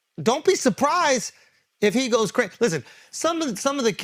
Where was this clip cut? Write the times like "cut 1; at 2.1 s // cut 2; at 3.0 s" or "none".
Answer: none